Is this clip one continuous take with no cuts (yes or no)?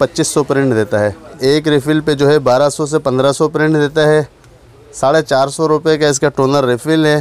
no